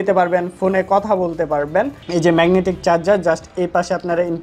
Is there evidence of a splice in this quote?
yes; 1 cut; at 2.0 s

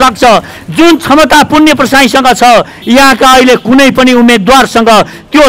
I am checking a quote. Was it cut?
no; 0 cuts

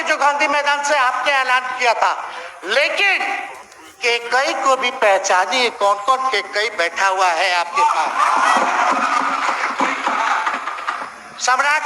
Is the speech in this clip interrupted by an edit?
yes; 1 cut; at 8.5 s

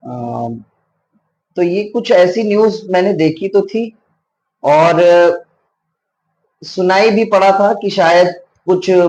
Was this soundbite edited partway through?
no; 0 cuts

